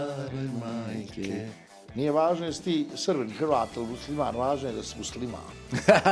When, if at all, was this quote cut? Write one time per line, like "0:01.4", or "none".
0:01.6